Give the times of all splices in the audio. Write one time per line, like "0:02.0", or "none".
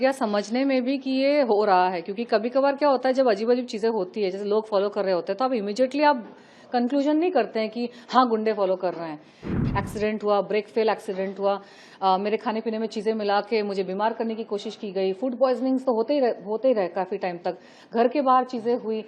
0:09.4